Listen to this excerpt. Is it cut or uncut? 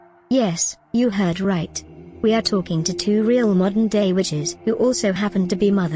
cut